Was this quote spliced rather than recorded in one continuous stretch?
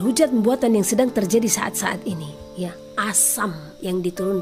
no; 0 cuts

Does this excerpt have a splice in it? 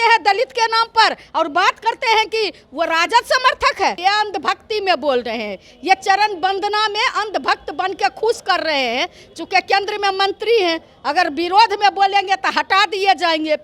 yes; 1 cut; at 4.0 s

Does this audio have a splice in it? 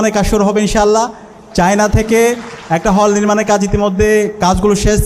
no; 0 cuts

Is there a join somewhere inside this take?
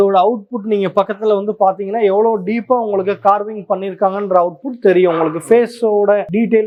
no; 0 cuts

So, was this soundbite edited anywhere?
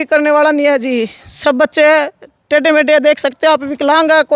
no; 0 cuts

